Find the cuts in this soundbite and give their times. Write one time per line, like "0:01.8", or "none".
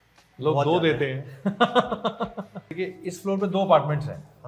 0:02.7